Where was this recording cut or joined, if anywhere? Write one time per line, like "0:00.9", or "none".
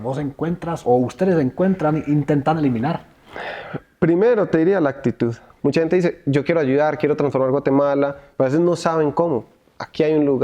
0:05.5

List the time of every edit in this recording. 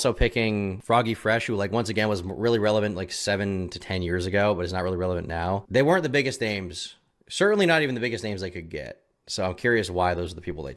none

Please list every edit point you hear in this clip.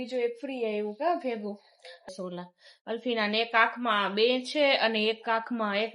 0:02.1

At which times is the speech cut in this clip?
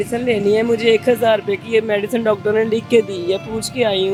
none

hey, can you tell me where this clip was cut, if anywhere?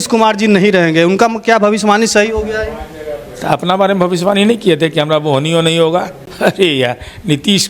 0:06.2

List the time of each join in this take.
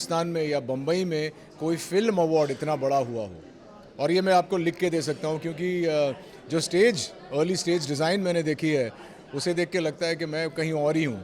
none

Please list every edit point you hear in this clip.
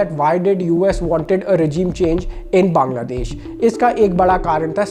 none

